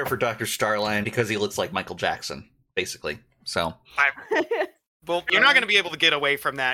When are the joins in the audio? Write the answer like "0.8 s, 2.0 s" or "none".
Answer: 1.1 s, 5.2 s